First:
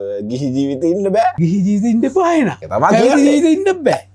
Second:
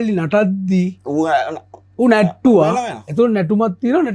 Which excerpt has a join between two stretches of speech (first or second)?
first